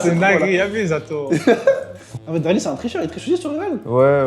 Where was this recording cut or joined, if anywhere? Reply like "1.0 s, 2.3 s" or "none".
2.0 s